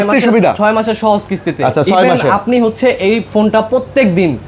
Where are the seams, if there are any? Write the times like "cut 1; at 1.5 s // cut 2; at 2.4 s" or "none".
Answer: none